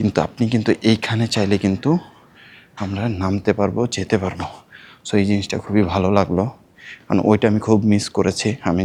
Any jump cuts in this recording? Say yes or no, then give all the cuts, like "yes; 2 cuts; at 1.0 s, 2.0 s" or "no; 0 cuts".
no; 0 cuts